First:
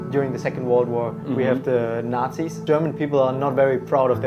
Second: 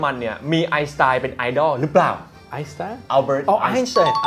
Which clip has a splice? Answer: first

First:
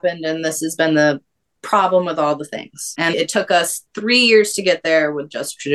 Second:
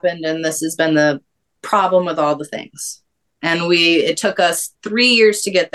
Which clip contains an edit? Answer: first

